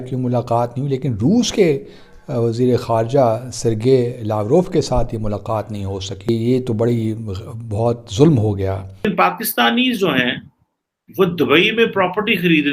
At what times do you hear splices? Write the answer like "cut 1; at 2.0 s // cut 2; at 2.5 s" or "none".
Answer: cut 1; at 6.3 s // cut 2; at 9.1 s